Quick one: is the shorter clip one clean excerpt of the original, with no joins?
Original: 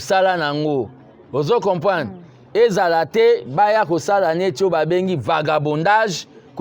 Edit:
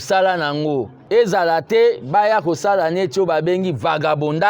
no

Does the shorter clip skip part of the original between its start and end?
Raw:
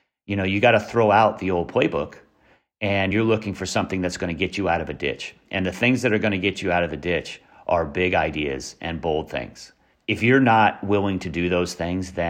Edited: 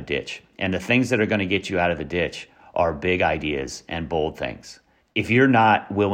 no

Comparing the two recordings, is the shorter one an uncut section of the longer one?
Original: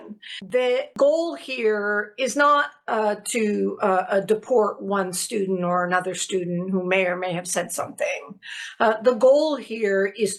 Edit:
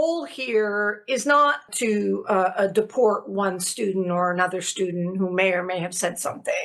no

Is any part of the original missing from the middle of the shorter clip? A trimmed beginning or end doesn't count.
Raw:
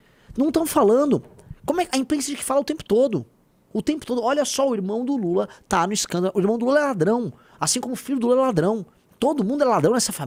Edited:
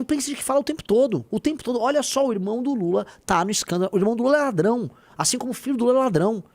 yes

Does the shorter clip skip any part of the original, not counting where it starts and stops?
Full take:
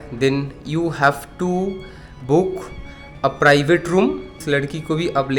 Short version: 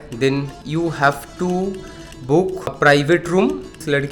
yes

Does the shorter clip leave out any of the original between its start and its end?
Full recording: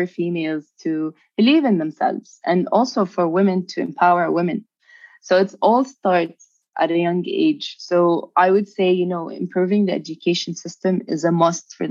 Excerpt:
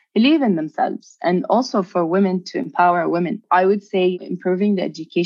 yes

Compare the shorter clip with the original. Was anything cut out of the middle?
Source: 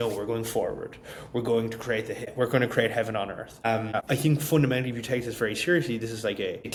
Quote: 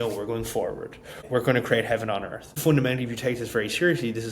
yes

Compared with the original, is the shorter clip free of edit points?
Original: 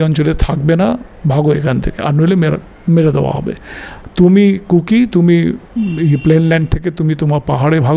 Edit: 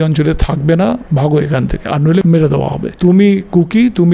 no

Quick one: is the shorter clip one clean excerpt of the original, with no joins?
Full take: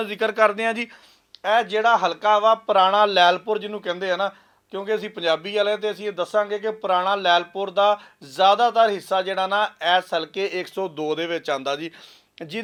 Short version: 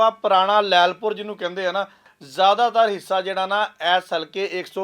no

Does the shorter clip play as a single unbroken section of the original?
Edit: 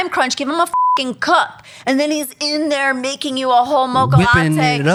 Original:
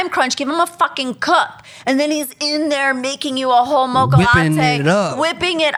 yes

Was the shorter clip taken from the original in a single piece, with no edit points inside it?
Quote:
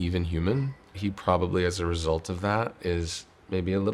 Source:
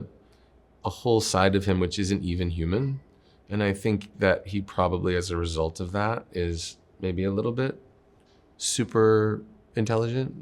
no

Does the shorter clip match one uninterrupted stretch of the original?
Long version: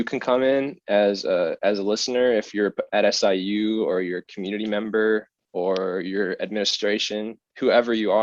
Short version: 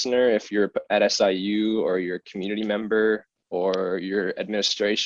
yes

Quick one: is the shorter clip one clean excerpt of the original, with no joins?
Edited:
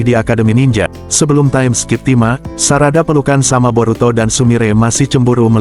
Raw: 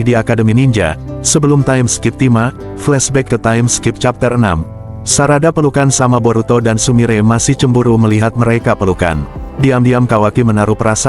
no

